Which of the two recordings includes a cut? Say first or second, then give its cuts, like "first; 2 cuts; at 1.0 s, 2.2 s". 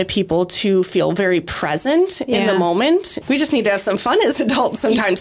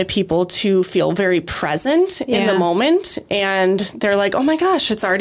first; 1 cut; at 3.1 s